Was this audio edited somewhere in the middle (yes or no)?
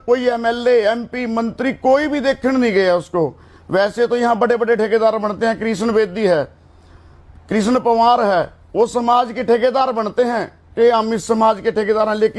no